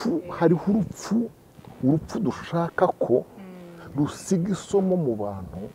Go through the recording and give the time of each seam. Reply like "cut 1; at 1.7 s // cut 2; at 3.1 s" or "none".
none